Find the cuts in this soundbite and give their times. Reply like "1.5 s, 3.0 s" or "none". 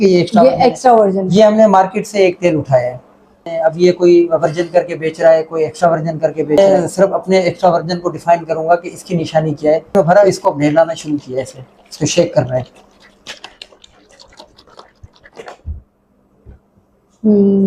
3.4 s, 6.6 s, 10.0 s, 13.1 s